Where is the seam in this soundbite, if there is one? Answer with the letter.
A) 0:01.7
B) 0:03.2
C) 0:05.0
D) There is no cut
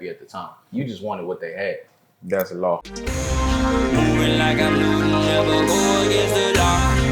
B